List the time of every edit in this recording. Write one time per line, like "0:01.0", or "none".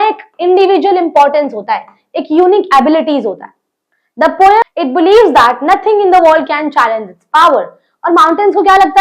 0:04.6

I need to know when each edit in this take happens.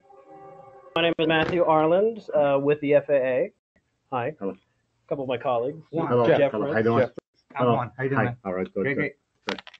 0:01.0

